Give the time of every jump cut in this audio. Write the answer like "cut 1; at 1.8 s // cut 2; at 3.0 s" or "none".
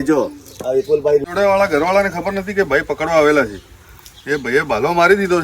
cut 1; at 1.2 s

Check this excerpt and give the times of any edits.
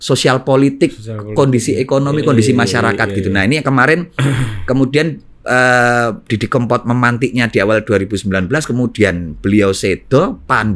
none

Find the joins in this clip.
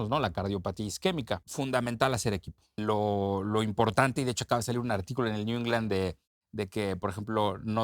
cut 1; at 1.5 s // cut 2; at 2.8 s

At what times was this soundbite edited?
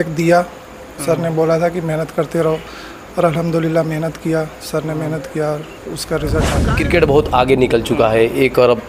cut 1; at 6.6 s

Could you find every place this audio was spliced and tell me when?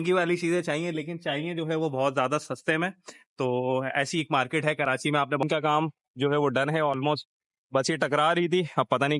cut 1; at 5.4 s

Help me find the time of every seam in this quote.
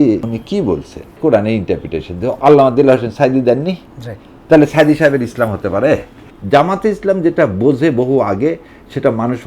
cut 1; at 1.2 s // cut 2; at 6.3 s

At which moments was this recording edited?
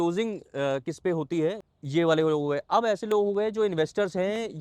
cut 1; at 1.6 s

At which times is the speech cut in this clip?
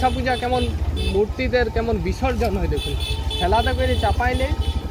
none

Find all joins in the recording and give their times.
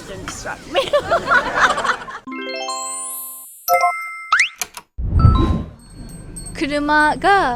none

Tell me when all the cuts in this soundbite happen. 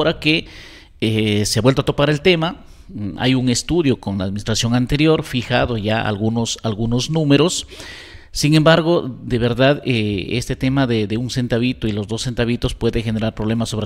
none

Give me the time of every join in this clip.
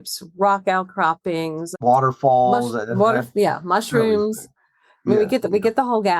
cut 1; at 1.6 s

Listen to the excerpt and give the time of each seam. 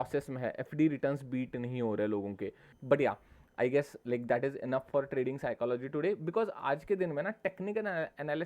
cut 1; at 2.7 s

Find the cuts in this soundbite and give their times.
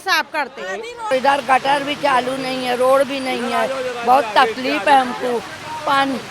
cut 1; at 1.1 s

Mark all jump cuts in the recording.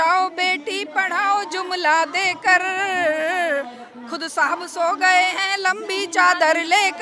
none

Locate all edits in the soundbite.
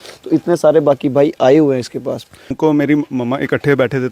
cut 1; at 2.5 s

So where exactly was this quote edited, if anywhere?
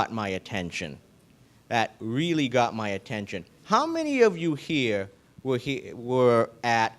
cut 1; at 2.8 s

